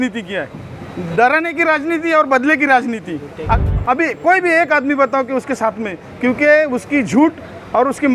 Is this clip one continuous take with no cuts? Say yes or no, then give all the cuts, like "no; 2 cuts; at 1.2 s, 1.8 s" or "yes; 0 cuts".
no; 1 cut; at 3.6 s